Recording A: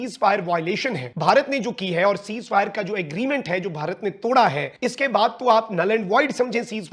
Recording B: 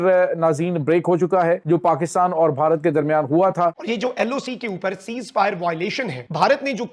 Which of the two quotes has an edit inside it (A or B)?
B